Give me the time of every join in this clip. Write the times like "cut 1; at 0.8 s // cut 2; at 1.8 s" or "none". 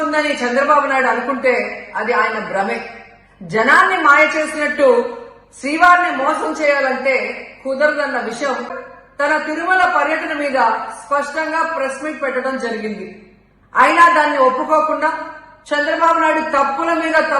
cut 1; at 8.8 s